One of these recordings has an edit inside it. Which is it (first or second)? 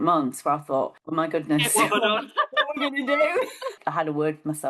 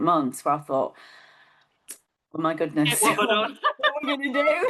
first